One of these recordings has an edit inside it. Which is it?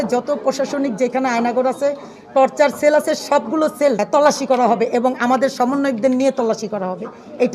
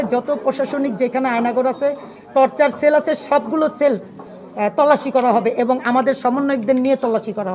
first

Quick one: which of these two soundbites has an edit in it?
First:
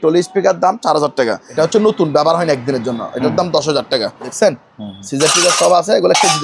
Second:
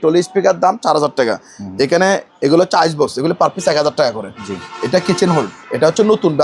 first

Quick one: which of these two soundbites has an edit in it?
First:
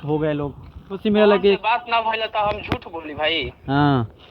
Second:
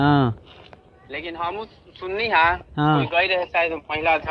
first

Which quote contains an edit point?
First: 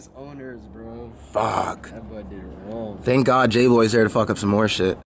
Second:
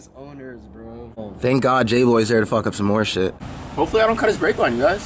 second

